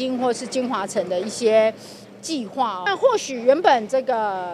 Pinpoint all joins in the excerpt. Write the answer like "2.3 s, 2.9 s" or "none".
2.8 s